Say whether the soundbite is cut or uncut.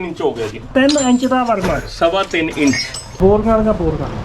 cut